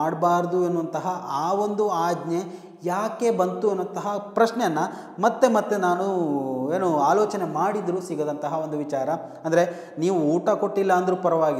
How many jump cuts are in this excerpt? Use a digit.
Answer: 0